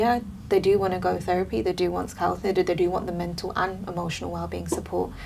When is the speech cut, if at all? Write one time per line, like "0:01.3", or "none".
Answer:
none